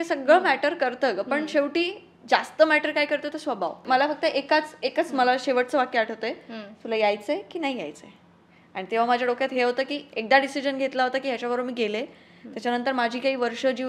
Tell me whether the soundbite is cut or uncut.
cut